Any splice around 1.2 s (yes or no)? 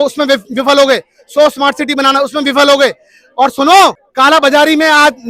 no